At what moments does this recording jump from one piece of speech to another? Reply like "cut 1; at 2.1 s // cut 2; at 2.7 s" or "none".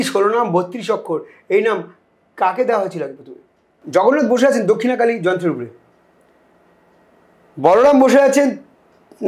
cut 1; at 3.7 s